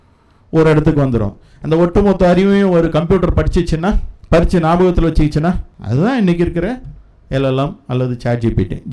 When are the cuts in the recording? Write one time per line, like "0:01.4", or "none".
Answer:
0:04.1
0:05.7